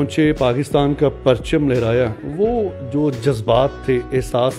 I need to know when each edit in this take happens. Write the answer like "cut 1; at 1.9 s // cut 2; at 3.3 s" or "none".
none